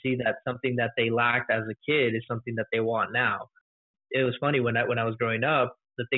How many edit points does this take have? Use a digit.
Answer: 1